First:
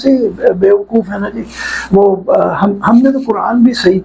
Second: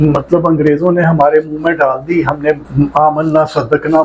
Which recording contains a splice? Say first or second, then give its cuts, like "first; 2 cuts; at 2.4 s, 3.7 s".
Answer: second; 1 cut; at 2.7 s